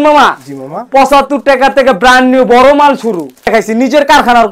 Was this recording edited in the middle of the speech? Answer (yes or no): yes